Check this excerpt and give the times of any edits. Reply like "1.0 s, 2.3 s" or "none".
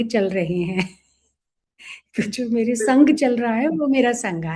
none